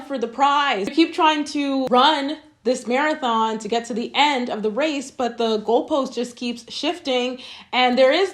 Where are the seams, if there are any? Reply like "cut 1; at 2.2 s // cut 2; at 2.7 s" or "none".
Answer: cut 1; at 0.9 s